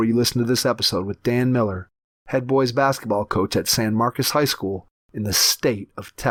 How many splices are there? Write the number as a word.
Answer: zero